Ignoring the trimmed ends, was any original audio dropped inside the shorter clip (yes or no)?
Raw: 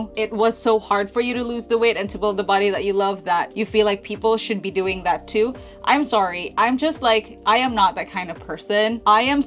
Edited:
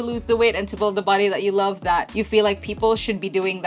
no